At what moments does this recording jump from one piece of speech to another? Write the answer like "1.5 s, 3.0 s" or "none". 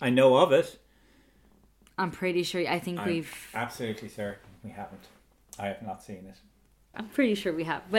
7.0 s